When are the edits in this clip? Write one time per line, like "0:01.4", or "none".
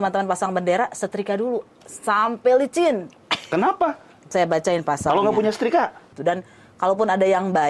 0:06.0